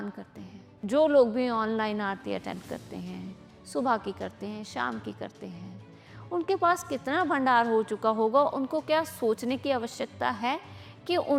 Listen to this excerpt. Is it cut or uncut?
uncut